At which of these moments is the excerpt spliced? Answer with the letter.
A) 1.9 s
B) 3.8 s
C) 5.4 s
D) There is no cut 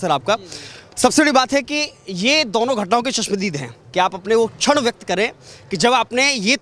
B